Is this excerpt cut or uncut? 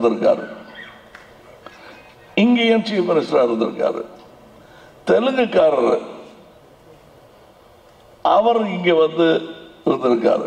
uncut